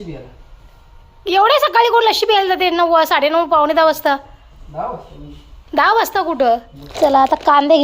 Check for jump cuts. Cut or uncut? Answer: cut